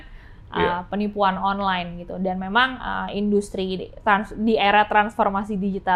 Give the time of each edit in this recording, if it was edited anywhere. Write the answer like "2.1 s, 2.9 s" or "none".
none